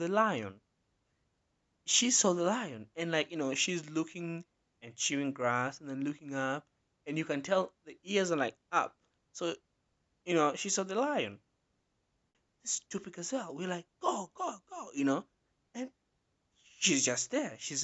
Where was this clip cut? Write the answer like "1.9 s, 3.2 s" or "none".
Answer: 12.4 s